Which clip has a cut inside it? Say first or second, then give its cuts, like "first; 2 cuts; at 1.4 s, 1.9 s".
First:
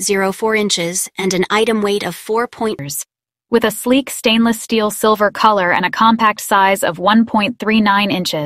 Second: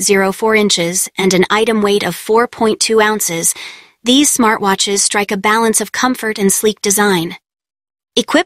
second; 1 cut; at 2.8 s